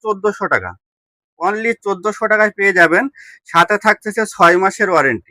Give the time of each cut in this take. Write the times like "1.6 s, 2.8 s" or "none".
none